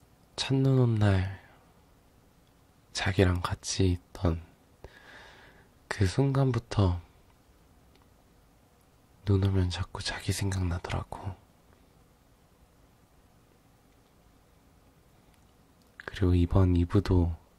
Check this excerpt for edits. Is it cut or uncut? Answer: cut